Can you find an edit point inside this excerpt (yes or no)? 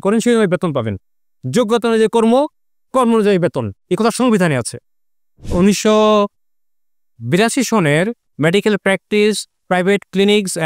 yes